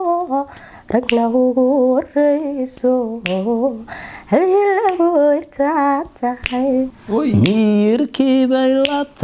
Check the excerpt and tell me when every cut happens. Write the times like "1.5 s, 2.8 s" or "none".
7.0 s